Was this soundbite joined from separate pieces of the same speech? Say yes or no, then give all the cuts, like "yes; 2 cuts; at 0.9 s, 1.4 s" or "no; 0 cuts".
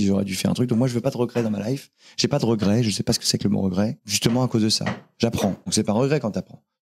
yes; 2 cuts; at 4.1 s, 5.6 s